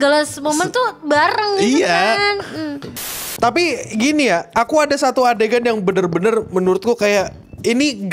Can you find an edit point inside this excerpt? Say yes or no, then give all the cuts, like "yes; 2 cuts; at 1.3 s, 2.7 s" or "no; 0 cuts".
yes; 1 cut; at 3.1 s